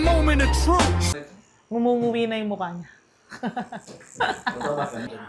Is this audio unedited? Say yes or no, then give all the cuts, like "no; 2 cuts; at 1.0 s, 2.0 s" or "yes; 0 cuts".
no; 1 cut; at 1.6 s